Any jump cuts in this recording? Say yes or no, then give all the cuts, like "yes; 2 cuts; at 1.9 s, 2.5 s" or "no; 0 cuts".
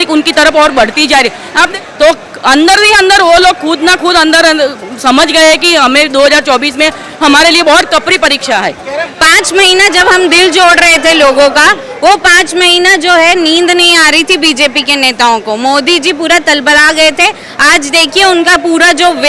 yes; 2 cuts; at 1.7 s, 9.1 s